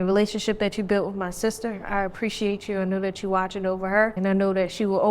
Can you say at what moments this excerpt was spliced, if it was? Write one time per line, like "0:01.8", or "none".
0:04.1